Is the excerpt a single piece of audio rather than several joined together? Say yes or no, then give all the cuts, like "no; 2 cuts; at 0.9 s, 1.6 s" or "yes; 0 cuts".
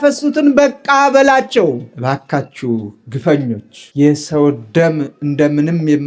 no; 1 cut; at 1.9 s